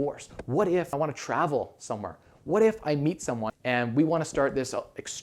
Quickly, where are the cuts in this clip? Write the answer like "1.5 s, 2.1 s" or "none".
1.0 s, 3.5 s